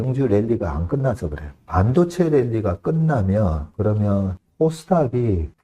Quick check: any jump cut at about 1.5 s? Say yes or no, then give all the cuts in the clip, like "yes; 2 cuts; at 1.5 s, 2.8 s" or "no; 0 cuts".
yes; 2 cuts; at 1.5 s, 4.1 s